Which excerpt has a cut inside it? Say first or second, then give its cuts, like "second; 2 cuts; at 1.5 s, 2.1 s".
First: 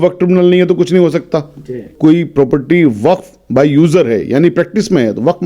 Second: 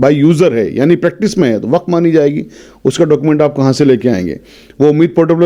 first; 1 cut; at 1.9 s